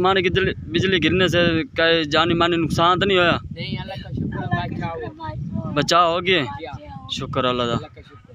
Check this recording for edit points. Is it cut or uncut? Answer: uncut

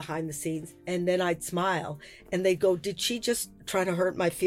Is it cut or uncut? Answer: cut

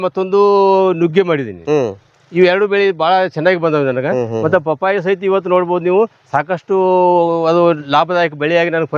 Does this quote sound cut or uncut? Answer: uncut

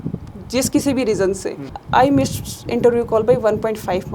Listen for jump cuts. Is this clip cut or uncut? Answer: cut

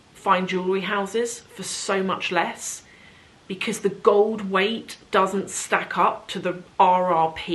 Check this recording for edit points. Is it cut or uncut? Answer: uncut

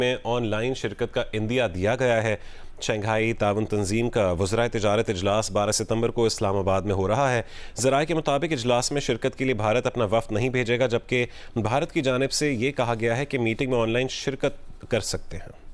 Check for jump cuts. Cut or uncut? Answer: uncut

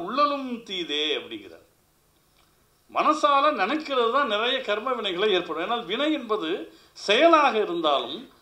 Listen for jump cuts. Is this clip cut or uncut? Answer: uncut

